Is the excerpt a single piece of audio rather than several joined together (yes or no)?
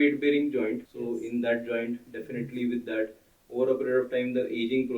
no